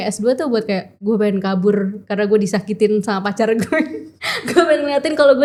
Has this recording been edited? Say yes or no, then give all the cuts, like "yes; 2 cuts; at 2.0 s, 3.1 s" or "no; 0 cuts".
no; 0 cuts